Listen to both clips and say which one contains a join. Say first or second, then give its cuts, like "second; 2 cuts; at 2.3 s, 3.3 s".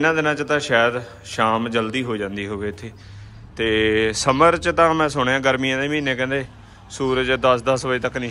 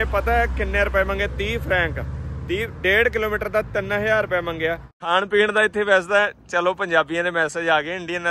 second; 1 cut; at 5.1 s